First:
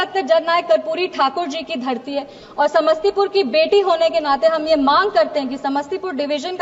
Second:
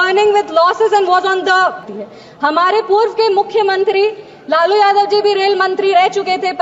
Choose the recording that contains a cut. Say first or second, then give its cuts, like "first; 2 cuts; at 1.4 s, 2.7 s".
second; 1 cut; at 1.9 s